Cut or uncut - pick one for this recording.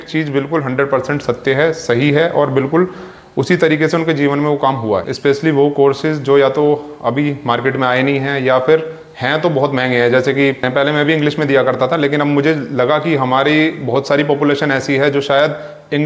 cut